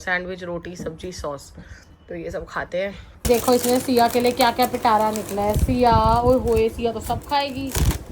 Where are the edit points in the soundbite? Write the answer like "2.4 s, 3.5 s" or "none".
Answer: 3.2 s